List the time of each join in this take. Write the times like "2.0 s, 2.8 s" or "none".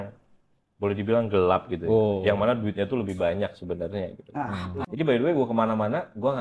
4.8 s